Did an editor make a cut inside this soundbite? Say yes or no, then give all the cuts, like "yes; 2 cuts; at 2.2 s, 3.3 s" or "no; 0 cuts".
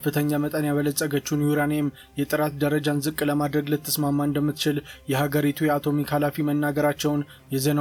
no; 0 cuts